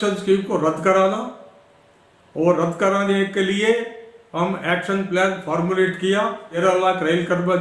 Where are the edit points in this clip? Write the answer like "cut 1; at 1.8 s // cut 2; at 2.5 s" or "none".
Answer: cut 1; at 6.5 s

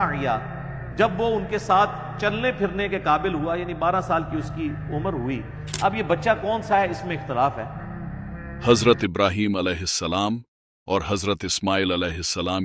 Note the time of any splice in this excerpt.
cut 1; at 8.3 s

